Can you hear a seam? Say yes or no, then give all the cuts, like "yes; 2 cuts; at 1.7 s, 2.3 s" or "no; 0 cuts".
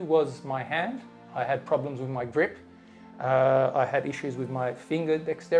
no; 0 cuts